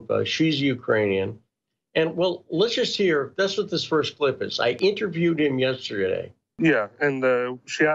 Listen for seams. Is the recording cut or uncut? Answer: cut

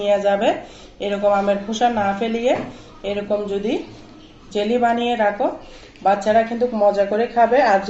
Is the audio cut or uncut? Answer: uncut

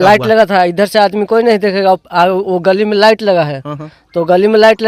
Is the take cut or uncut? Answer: uncut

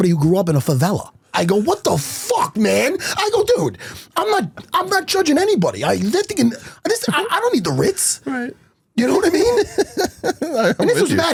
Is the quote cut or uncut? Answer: uncut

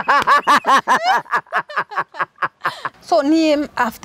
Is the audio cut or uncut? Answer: cut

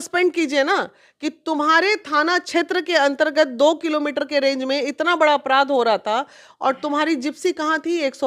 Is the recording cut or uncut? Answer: uncut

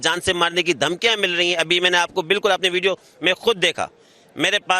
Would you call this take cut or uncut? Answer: uncut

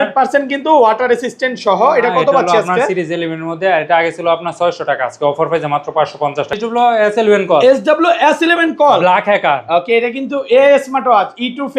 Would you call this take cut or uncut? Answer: cut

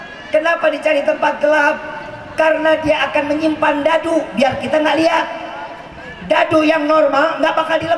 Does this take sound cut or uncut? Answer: uncut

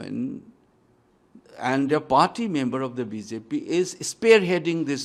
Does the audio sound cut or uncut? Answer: uncut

